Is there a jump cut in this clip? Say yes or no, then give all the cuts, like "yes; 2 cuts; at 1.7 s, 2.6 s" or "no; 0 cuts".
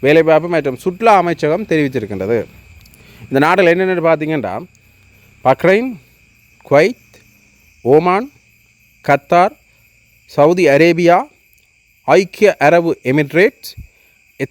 no; 0 cuts